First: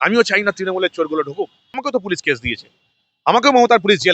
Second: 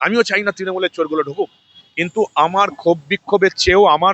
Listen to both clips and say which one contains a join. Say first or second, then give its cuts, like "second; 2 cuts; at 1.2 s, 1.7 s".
first; 1 cut; at 1.8 s